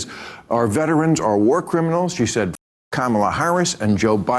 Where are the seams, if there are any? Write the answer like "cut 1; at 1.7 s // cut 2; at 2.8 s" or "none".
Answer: none